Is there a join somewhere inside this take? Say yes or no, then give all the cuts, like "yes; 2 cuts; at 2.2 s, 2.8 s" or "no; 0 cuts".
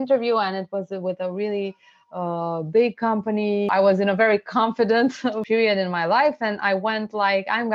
yes; 2 cuts; at 3.7 s, 5.4 s